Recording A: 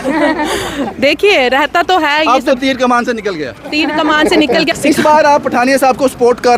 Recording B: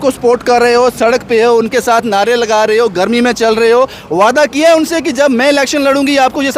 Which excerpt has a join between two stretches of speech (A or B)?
A